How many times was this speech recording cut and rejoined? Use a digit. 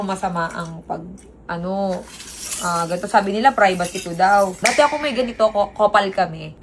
1